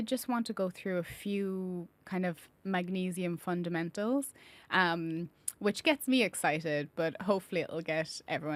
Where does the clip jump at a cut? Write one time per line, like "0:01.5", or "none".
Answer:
none